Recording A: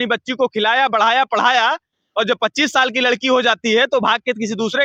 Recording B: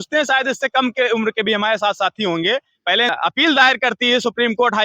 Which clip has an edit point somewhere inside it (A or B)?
B